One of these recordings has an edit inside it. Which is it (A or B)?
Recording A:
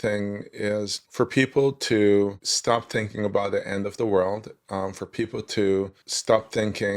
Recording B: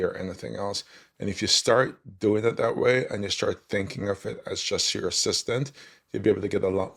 A